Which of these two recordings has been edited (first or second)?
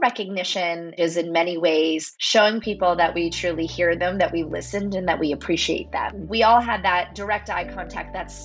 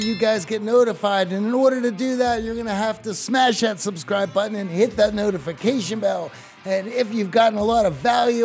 first